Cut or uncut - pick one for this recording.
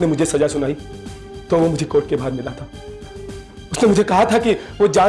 uncut